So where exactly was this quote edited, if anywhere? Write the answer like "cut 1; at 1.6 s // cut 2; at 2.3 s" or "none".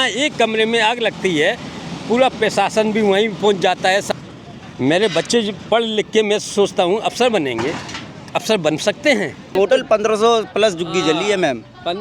cut 1; at 4.1 s // cut 2; at 9.6 s